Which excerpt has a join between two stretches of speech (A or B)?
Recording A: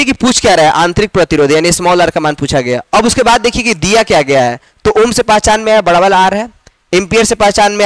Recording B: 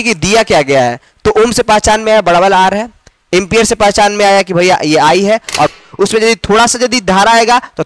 B